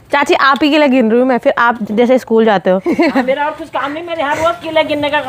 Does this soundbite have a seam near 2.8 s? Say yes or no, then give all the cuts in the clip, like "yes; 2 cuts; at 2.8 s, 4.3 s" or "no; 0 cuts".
yes; 1 cut; at 2.8 s